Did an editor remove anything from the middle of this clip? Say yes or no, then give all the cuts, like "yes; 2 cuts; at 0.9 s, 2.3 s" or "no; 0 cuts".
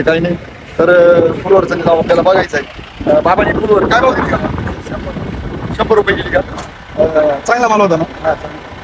no; 0 cuts